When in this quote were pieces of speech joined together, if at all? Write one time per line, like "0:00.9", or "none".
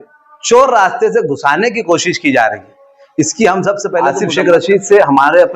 0:04.1